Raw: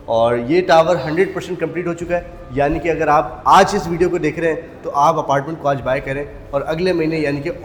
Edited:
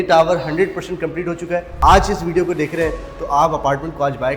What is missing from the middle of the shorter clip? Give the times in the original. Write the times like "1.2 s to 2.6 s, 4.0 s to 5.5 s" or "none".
2.3 s to 3.3 s